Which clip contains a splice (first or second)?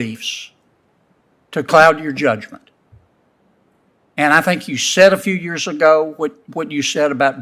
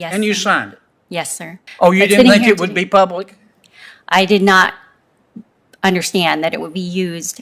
second